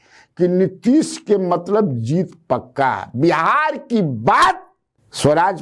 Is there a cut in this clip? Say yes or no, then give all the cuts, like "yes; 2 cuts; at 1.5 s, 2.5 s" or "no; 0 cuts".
no; 0 cuts